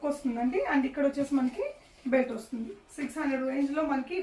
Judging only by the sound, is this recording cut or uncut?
uncut